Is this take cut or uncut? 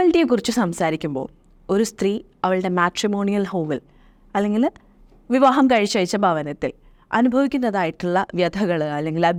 uncut